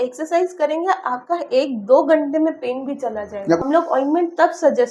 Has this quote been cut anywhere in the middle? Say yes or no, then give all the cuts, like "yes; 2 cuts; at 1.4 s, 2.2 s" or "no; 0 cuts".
yes; 1 cut; at 3.6 s